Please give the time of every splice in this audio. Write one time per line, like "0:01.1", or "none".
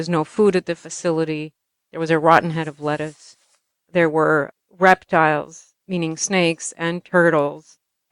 0:04.6
0:05.7

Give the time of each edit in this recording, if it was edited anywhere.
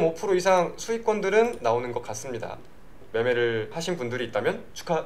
0:03.0

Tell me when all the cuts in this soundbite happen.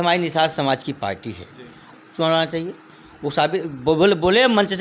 0:01.8

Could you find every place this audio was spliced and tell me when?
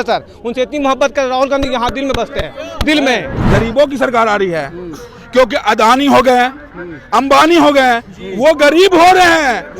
0:03.4

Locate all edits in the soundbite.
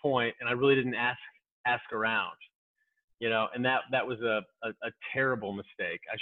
none

